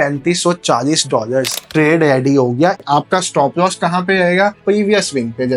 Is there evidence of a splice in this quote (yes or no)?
yes